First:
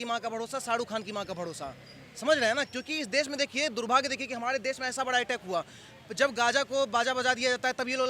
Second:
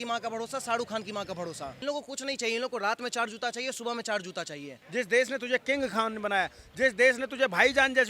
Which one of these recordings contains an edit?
second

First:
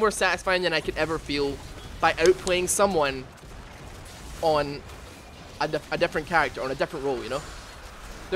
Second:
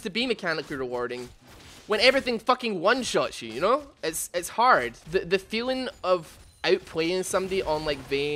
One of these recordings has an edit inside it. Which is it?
second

